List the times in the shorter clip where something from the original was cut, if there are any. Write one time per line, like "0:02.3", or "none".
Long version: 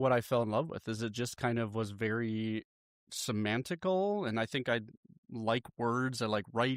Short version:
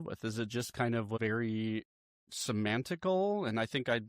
0:01.2